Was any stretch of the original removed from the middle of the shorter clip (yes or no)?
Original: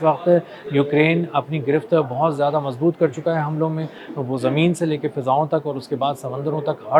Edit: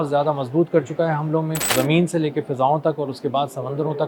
yes